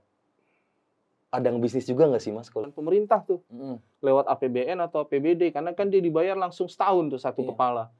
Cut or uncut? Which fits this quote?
cut